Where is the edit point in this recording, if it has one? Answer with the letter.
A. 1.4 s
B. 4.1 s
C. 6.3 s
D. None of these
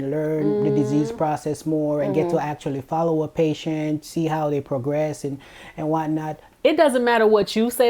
C